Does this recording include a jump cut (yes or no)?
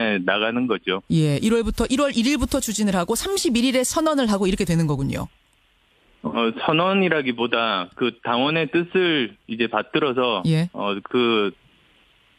no